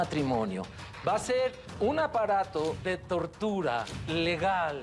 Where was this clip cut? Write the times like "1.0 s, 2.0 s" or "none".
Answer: 1.6 s, 2.8 s, 4.0 s